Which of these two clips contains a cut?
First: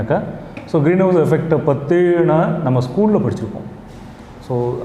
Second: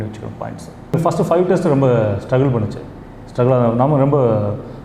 second; 1 cut; at 0.9 s

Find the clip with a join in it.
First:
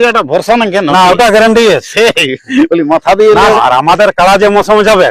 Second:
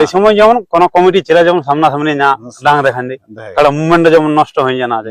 first; 1 cut; at 3.7 s

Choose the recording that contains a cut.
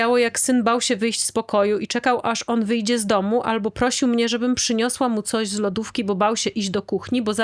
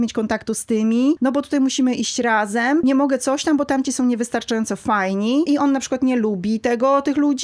second; 3 cuts; at 1.2 s, 2.8 s, 5.5 s

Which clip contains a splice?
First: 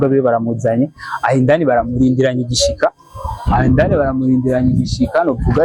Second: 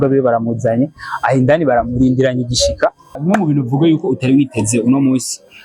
second; 1 cut; at 3.2 s

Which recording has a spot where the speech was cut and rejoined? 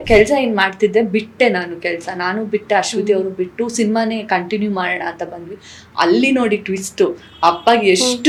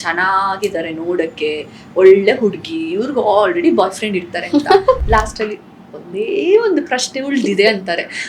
second; 1 cut; at 5.0 s

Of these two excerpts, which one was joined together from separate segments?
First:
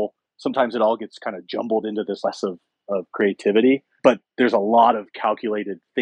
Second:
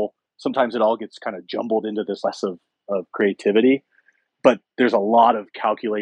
first; 1 cut; at 3.9 s

